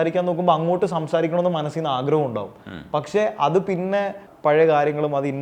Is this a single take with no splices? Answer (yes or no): yes